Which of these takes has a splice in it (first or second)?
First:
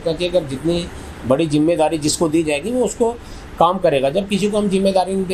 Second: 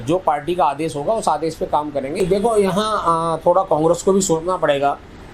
second